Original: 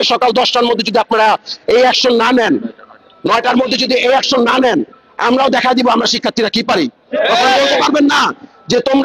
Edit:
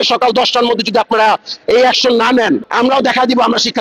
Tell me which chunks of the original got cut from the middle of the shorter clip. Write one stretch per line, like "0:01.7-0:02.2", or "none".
0:02.7-0:05.1